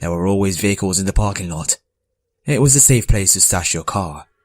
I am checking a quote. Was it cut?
yes; 1 cut; at 2.5 s

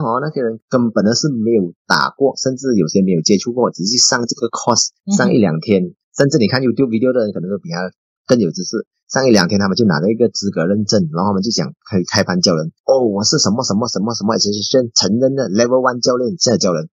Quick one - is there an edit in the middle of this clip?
no; 0 cuts

